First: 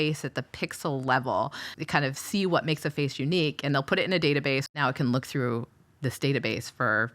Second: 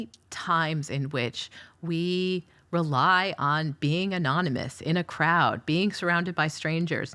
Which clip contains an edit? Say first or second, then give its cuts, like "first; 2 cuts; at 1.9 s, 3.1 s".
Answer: first; 2 cuts; at 1.7 s, 4.7 s